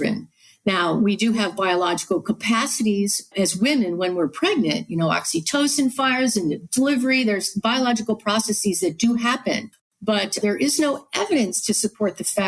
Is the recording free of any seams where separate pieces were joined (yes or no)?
no